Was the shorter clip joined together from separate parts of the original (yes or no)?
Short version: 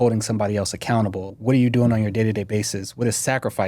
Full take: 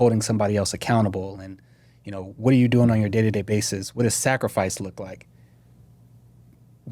yes